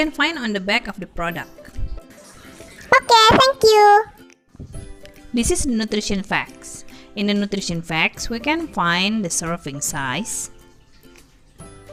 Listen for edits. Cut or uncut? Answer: uncut